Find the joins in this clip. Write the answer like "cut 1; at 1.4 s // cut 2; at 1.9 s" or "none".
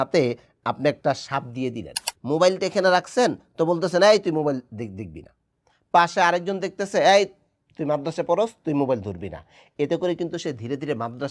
cut 1; at 2.1 s